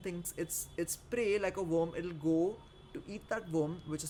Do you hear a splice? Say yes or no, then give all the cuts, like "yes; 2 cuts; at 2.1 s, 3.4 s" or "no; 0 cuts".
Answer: no; 0 cuts